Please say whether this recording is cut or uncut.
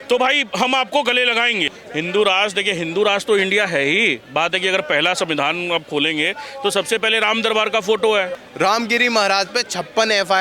cut